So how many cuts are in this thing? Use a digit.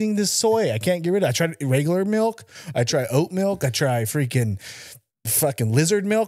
0